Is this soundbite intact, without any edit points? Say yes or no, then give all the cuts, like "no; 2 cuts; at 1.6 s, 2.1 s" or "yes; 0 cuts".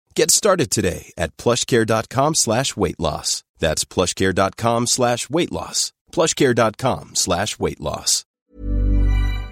no; 1 cut; at 8.3 s